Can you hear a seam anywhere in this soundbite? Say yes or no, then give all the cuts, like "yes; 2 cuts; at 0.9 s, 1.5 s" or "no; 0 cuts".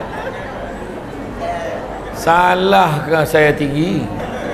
no; 0 cuts